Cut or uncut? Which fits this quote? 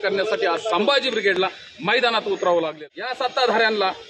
cut